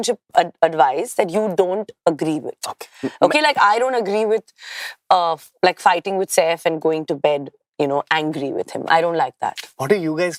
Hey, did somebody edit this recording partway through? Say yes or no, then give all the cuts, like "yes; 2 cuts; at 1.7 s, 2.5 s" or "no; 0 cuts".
no; 0 cuts